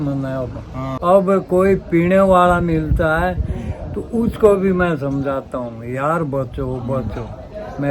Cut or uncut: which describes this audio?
cut